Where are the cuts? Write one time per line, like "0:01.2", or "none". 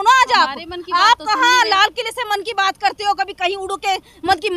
none